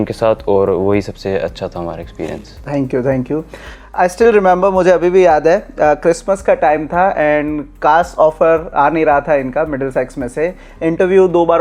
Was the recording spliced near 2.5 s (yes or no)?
no